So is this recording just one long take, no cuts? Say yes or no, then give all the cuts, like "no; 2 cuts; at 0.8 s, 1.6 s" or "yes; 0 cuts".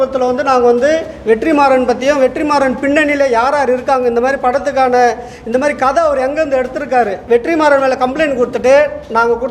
no; 1 cut; at 7.2 s